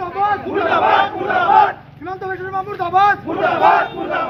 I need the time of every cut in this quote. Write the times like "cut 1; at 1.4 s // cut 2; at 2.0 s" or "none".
none